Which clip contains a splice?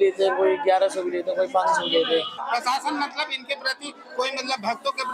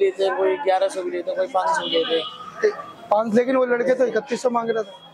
first; 1 cut; at 2.4 s

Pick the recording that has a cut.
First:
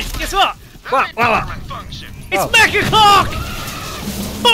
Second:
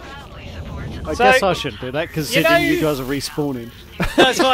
second; 1 cut; at 1.1 s

